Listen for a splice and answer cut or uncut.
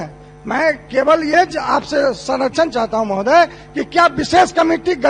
uncut